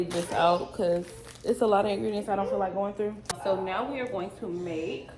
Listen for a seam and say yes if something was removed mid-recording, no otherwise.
yes